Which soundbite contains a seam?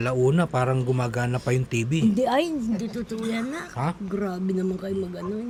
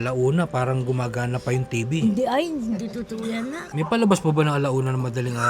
second; 1 cut; at 3.7 s

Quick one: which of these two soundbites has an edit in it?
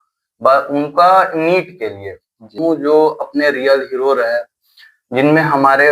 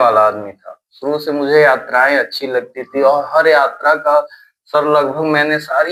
first; 1 cut; at 2.6 s

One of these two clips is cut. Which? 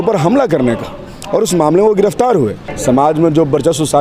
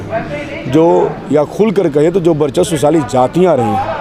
first; 1 cut; at 2.7 s

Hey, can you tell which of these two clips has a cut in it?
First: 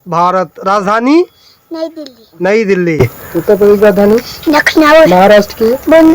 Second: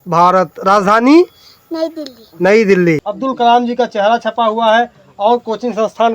second; 1 cut; at 3.0 s

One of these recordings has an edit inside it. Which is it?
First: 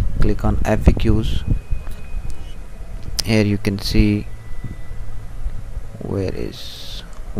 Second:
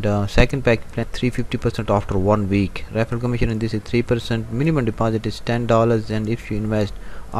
second; 1 cut; at 1.1 s

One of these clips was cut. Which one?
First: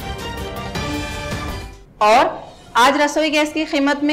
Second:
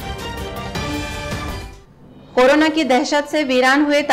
second; 1 cut; at 1.6 s

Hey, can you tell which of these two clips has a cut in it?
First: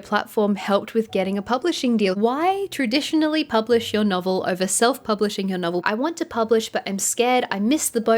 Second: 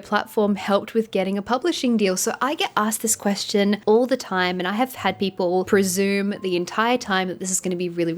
first; 2 cuts; at 2.2 s, 5.8 s

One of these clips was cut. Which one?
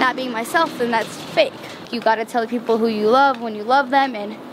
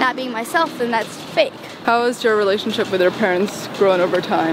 first; 1 cut; at 1.8 s

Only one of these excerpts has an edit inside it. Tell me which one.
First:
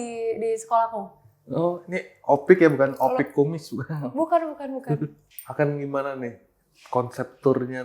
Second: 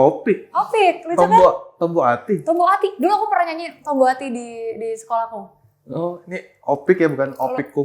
first; 1 cut; at 5.3 s

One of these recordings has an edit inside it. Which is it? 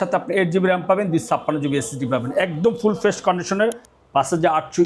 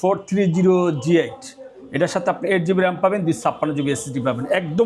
first; 1 cut; at 3.9 s

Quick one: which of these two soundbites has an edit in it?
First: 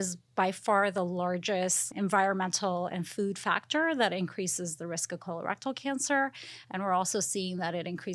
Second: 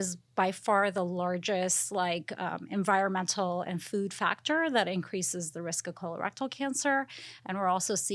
first; 1 cut; at 1.8 s

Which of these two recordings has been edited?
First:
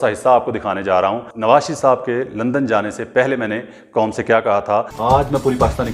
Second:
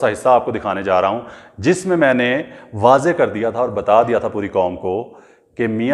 first; 2 cuts; at 1.3 s, 4.9 s

